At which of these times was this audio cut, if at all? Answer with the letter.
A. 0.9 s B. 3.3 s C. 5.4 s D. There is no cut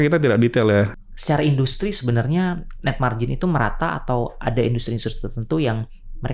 A